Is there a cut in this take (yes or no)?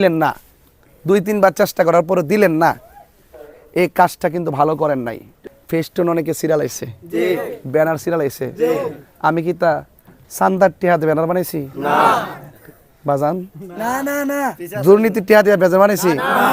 yes